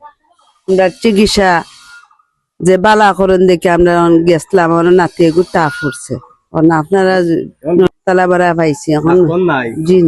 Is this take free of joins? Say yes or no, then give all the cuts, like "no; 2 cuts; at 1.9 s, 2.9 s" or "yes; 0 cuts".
no; 1 cut; at 7.9 s